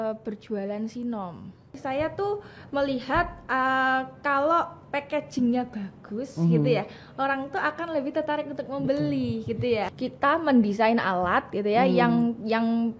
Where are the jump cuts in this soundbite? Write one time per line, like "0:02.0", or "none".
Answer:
0:01.7
0:09.9